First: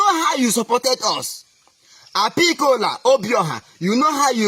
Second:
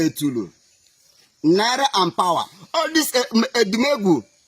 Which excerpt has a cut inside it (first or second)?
second